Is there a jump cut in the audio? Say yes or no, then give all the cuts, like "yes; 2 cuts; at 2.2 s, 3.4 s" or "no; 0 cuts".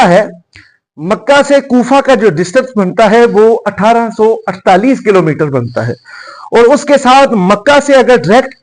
no; 0 cuts